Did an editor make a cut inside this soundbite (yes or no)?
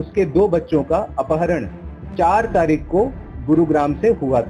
no